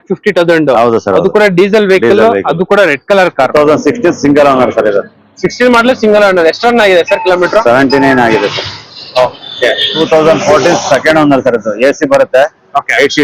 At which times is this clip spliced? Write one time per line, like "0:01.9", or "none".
0:03.5
0:09.9